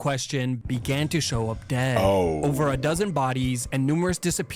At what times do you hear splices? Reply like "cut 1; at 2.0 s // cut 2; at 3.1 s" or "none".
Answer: none

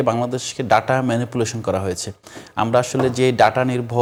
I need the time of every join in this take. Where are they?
none

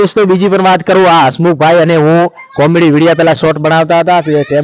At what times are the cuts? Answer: none

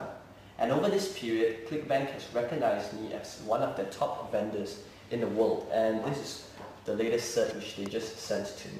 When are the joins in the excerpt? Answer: cut 1; at 6.3 s

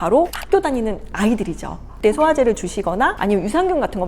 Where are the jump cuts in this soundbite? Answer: cut 1; at 1.9 s

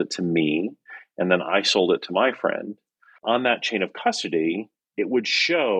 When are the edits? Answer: none

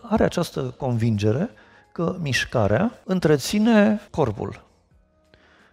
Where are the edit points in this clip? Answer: cut 1; at 3.0 s // cut 2; at 4.1 s

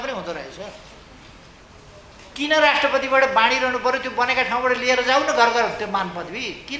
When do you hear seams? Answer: cut 1; at 1.6 s

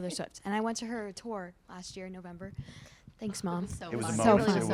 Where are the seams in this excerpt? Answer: none

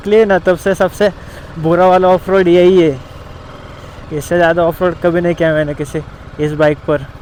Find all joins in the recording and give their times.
none

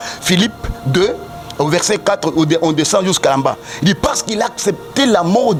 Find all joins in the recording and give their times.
none

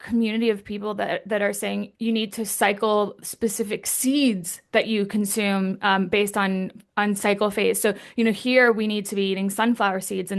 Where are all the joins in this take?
cut 1; at 1.9 s

